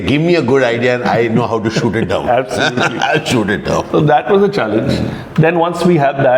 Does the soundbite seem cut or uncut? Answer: uncut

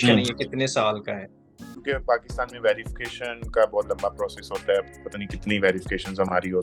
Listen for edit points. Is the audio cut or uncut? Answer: cut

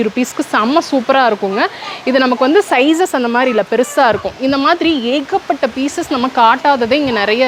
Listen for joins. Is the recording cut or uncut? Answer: uncut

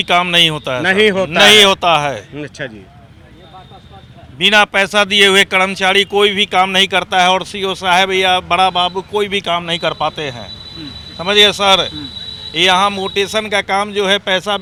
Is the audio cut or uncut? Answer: uncut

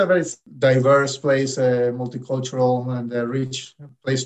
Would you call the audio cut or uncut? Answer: uncut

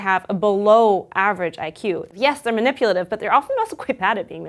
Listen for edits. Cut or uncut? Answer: cut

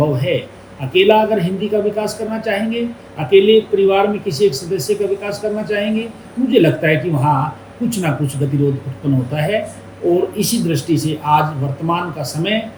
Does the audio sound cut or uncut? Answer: uncut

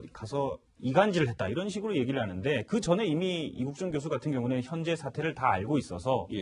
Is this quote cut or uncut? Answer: cut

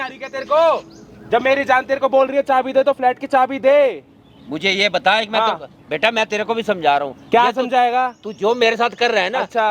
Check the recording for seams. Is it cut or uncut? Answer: uncut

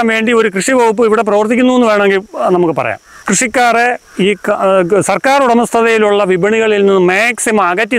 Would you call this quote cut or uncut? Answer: cut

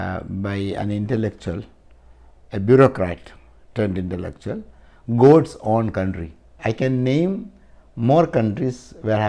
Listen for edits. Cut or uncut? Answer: cut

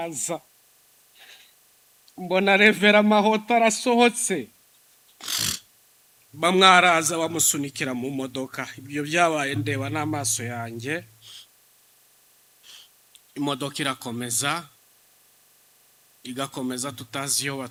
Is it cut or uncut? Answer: uncut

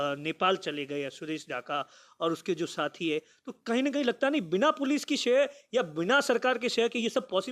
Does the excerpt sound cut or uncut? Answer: uncut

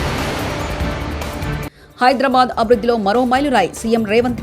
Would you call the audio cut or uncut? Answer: cut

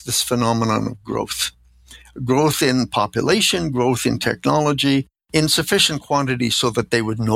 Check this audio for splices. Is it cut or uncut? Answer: cut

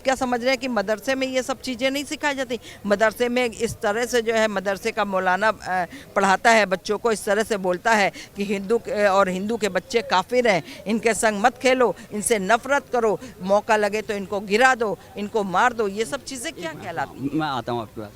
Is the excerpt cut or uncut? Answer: uncut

